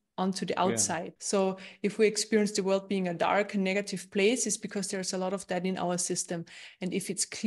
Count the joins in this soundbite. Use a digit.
1